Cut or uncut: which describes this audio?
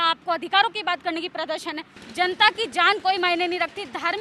cut